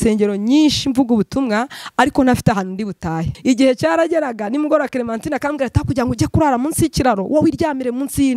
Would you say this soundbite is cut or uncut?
cut